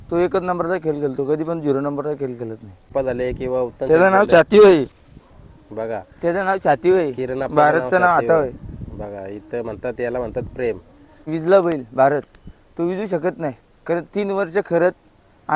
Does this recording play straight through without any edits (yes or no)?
no